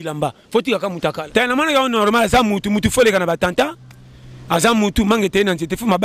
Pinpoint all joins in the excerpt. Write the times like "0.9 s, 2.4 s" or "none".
1.2 s

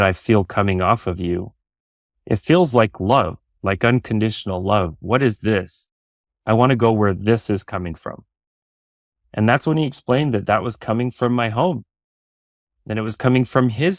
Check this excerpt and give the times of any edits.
none

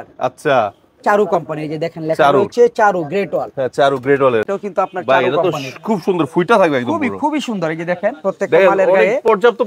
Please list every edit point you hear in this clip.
4.4 s

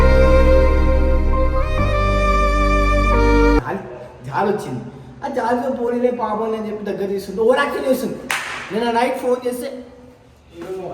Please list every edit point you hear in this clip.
3.7 s

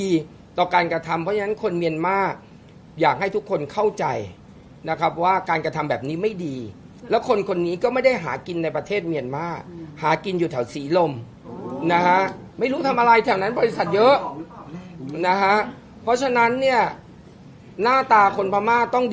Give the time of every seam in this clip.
none

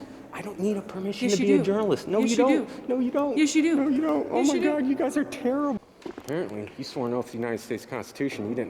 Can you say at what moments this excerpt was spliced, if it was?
5.8 s

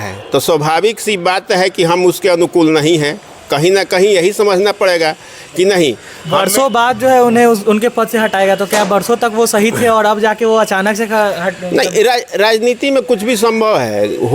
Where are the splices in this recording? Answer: none

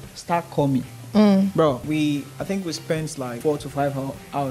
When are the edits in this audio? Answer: 1.8 s, 3.4 s

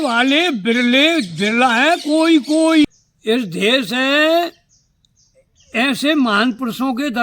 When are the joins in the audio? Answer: 2.9 s

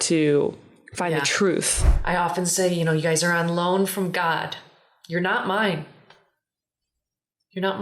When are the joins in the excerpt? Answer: 1.9 s

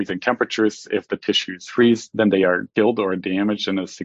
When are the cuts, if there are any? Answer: none

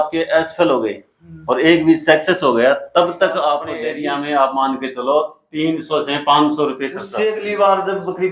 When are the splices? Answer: 3.7 s, 7.0 s

